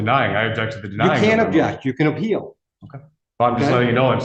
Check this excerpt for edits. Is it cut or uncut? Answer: uncut